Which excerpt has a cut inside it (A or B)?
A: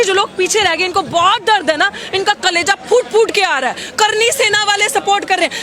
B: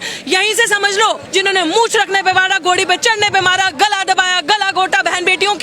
B